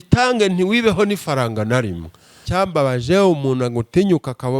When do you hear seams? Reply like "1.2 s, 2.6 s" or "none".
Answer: 2.4 s